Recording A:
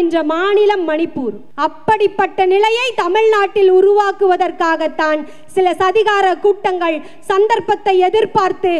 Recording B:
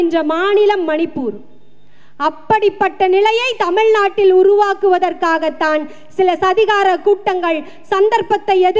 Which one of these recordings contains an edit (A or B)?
A